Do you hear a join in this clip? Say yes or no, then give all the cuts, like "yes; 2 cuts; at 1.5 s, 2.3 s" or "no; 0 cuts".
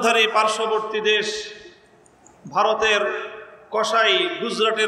no; 0 cuts